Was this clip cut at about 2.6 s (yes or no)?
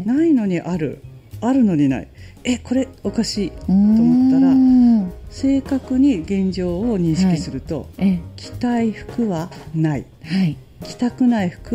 no